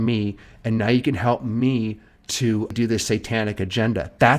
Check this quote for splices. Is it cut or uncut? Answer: cut